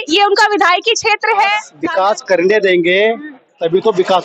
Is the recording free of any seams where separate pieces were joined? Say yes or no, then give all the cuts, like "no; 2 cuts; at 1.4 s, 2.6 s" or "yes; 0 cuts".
no; 1 cut; at 1.7 s